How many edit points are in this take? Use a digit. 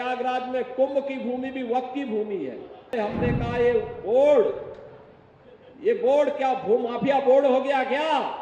1